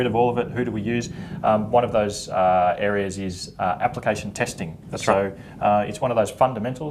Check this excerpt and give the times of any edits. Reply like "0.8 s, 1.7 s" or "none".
1.0 s

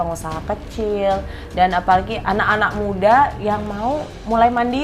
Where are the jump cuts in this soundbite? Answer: none

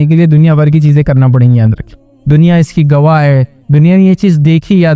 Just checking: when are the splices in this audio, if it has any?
2.1 s

